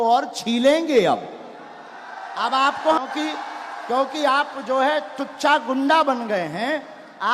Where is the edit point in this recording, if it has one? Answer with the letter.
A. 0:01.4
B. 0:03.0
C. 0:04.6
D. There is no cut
B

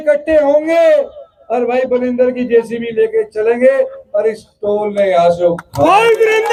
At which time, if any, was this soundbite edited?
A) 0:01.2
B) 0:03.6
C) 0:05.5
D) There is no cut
D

